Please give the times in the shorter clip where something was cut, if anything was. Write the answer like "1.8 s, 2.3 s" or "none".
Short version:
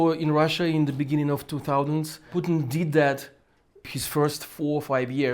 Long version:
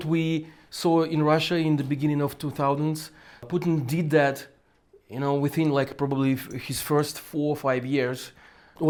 2.2 s, 3.8 s